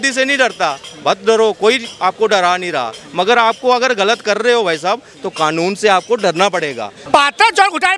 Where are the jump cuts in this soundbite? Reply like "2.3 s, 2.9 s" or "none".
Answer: 6.9 s